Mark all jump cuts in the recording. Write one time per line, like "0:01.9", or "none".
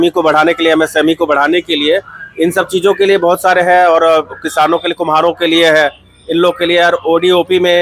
none